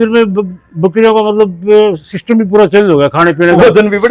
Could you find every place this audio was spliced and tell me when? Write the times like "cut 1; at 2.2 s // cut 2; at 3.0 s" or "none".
none